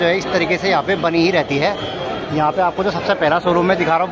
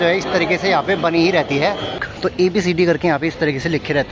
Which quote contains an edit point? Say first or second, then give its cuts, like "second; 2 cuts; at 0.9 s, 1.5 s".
second; 1 cut; at 2.1 s